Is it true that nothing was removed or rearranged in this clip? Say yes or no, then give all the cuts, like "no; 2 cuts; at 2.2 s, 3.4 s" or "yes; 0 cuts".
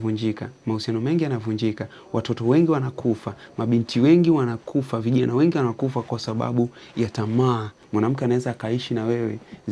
no; 1 cut; at 7.7 s